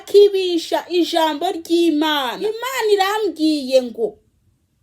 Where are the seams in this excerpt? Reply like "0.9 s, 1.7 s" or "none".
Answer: 2.7 s